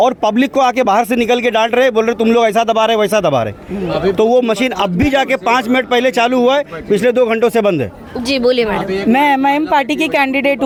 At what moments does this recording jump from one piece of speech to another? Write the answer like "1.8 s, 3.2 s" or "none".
none